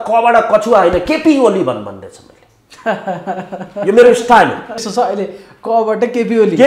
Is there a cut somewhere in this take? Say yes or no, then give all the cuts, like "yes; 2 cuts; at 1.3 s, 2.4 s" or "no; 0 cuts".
yes; 1 cut; at 4.9 s